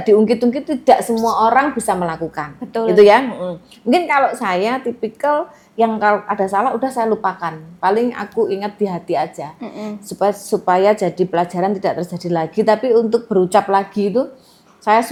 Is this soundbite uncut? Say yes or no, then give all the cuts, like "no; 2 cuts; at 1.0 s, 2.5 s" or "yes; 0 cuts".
yes; 0 cuts